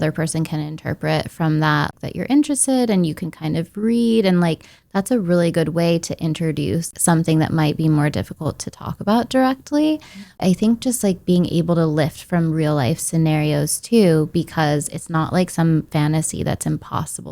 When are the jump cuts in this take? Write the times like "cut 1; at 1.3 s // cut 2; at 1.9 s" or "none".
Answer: cut 1; at 1.9 s // cut 2; at 6.9 s // cut 3; at 10.4 s

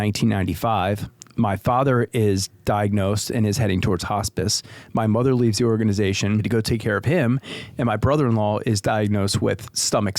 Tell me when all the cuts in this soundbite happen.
cut 1; at 6.5 s

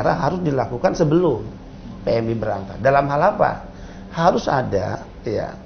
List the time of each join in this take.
none

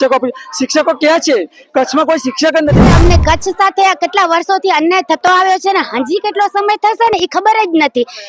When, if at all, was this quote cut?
cut 1; at 2.9 s

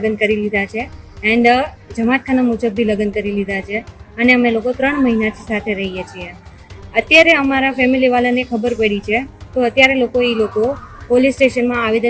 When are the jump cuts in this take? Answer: none

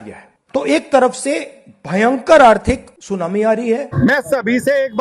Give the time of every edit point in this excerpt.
cut 1; at 3.9 s

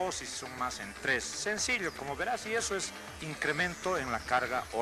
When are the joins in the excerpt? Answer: cut 1; at 2.1 s

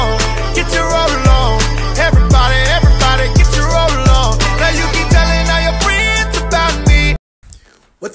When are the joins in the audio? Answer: cut 1; at 7.2 s

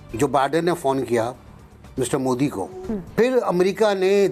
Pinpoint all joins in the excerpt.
cut 1; at 2.8 s

